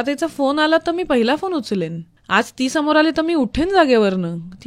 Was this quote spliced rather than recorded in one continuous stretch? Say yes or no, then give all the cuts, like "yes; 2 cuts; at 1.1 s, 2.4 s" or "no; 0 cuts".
no; 0 cuts